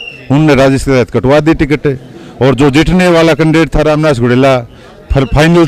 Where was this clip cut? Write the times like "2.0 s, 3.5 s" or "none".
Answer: none